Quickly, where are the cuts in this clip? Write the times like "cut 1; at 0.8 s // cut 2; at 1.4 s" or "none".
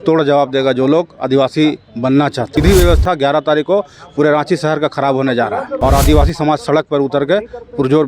cut 1; at 2.5 s // cut 2; at 5.7 s